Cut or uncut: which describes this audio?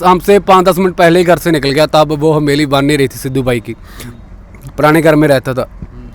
uncut